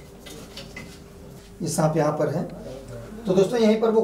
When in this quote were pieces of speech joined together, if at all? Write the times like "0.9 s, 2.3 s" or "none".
1.4 s